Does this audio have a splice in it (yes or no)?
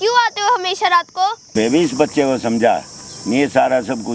yes